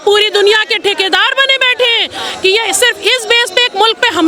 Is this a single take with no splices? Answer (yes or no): yes